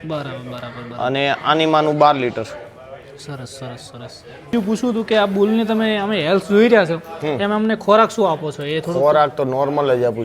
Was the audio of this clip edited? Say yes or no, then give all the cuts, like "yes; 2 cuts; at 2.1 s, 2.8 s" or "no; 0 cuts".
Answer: yes; 1 cut; at 4.5 s